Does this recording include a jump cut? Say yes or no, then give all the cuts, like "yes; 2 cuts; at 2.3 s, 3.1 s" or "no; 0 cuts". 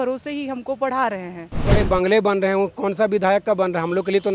yes; 1 cut; at 1.8 s